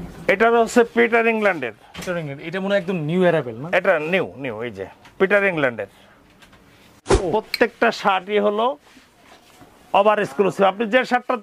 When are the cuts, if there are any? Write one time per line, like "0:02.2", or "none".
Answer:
0:07.2